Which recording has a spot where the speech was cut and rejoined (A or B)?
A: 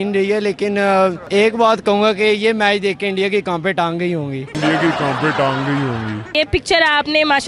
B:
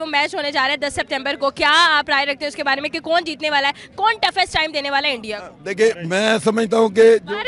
A